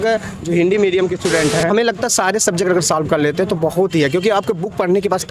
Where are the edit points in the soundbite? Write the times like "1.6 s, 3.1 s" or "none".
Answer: 1.7 s